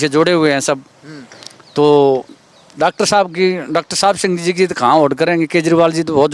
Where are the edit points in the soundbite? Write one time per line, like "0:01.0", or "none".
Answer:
none